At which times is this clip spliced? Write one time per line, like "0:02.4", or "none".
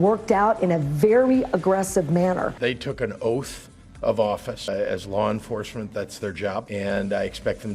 0:02.5